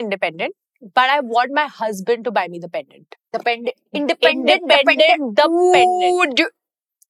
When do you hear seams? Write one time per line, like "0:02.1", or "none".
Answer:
none